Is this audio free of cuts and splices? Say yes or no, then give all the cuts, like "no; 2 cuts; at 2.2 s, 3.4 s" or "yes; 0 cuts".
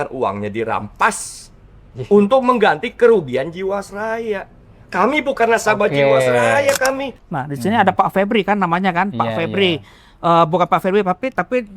no; 1 cut; at 7.2 s